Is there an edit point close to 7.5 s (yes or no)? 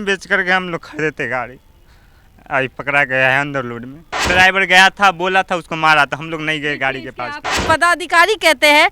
yes